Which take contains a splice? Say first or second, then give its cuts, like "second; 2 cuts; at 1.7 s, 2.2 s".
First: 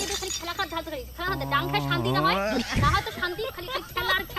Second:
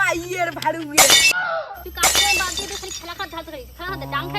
second; 1 cut; at 1.3 s